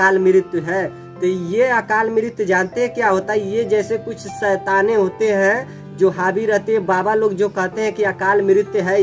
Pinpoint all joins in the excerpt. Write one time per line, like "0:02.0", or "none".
none